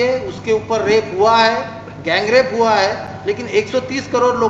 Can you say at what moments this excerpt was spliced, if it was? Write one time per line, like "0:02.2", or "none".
none